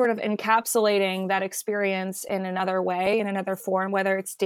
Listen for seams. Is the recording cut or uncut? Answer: uncut